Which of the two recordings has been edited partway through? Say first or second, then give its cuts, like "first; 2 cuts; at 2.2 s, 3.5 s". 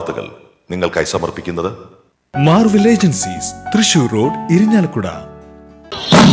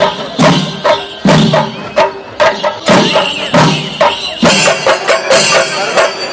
second; 1 cut; at 1.1 s